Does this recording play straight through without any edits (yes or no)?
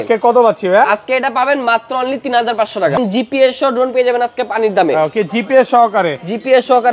no